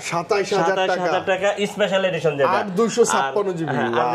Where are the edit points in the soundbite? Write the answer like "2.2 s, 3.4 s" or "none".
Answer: none